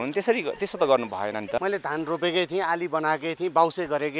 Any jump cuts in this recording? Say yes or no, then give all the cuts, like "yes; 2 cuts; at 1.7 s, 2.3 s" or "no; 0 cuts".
yes; 1 cut; at 1.6 s